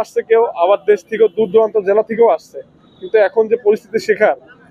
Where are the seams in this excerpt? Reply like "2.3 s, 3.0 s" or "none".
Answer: none